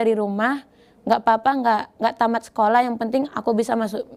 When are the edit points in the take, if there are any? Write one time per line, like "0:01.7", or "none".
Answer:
none